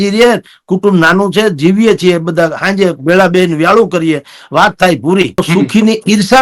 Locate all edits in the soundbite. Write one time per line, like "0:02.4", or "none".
0:05.4